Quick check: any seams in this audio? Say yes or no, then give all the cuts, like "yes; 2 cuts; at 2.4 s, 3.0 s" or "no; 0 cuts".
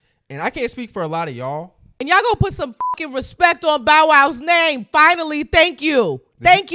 yes; 1 cut; at 1.8 s